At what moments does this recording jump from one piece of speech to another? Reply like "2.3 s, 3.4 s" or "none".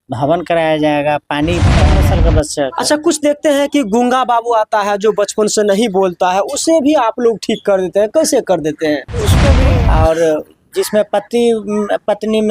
1.9 s, 9.6 s